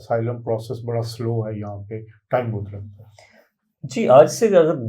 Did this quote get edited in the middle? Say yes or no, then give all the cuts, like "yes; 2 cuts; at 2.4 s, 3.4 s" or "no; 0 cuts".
no; 0 cuts